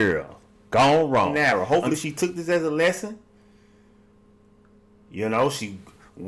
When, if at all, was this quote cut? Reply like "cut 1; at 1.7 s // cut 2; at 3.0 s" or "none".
cut 1; at 1.8 s